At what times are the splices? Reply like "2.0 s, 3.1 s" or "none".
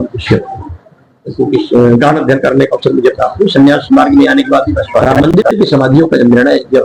5.5 s